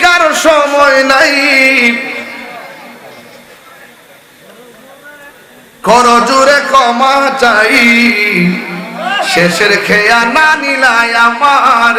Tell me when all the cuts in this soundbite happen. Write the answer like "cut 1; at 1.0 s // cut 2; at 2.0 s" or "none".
none